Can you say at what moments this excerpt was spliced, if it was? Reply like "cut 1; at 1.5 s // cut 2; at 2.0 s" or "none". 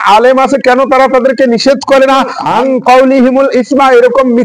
cut 1; at 2.4 s

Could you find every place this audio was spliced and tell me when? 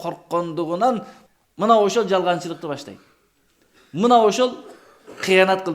cut 1; at 1.2 s

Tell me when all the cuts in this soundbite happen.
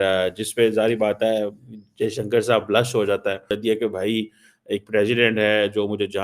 cut 1; at 3.5 s

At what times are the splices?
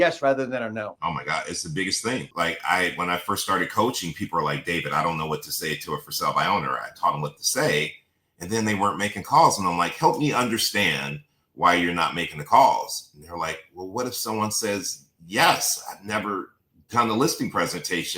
cut 1; at 0.9 s // cut 2; at 2.3 s

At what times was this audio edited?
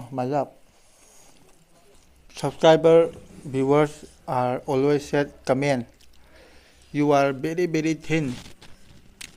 cut 1; at 2.0 s

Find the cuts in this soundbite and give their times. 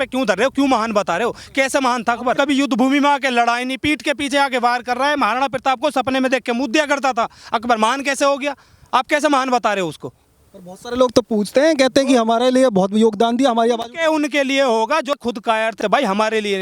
none

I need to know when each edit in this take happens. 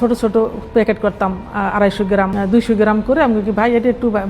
cut 1; at 2.3 s

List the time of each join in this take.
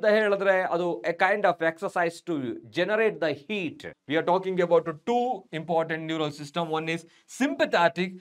cut 1; at 3.9 s

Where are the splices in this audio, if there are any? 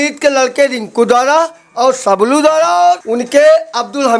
cut 1; at 3.1 s

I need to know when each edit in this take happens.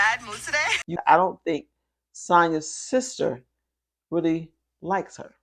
cut 1; at 0.9 s

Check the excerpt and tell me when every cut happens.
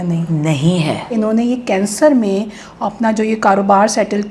cut 1; at 1.1 s

